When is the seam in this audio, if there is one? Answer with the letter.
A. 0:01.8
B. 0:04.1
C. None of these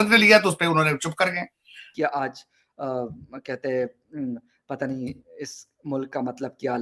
A